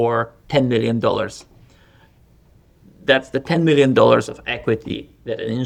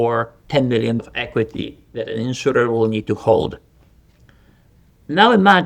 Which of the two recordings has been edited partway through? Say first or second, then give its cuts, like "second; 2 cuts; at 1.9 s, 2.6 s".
second; 1 cut; at 1.0 s